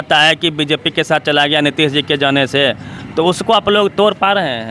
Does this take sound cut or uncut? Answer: uncut